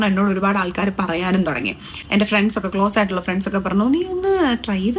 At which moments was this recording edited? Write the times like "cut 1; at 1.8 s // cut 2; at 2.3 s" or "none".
none